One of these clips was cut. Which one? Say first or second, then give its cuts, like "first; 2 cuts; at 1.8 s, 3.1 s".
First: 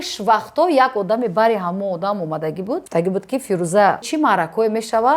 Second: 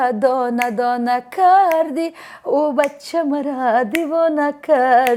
first; 2 cuts; at 2.8 s, 4.1 s